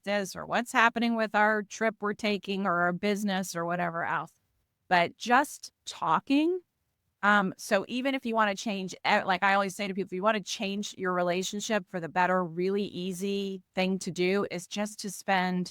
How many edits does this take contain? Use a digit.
0